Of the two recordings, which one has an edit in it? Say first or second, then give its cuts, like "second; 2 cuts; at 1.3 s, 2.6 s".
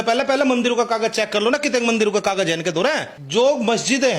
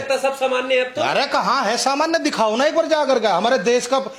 first; 1 cut; at 3.1 s